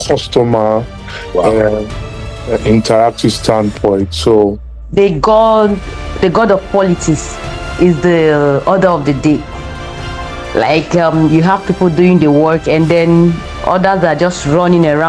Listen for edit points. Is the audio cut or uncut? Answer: cut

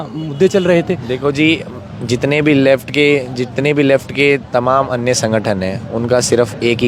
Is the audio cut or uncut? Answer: uncut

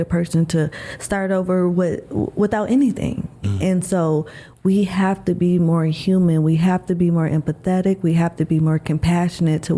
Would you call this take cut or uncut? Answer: uncut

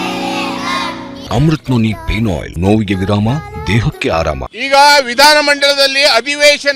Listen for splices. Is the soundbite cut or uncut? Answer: cut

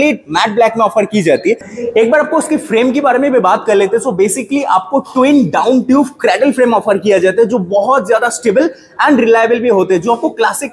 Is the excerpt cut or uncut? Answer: cut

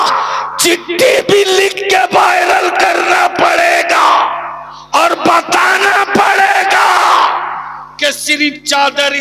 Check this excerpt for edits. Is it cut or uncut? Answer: uncut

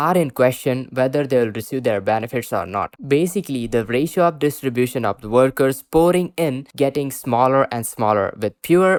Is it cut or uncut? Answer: uncut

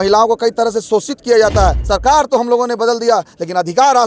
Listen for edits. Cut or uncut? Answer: cut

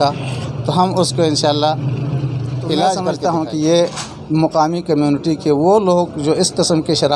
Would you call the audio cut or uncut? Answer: cut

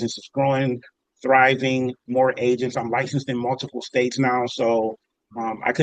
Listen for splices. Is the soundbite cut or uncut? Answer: uncut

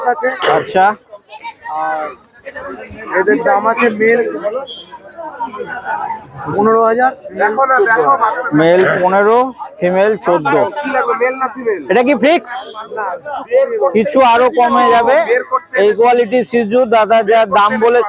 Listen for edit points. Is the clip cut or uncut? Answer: uncut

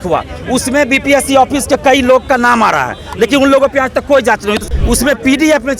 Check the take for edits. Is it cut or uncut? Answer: uncut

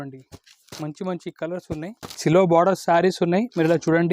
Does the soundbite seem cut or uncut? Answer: cut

